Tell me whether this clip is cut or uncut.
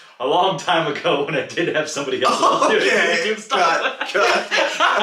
uncut